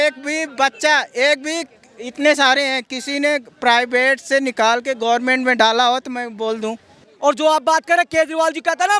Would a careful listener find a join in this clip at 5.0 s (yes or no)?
no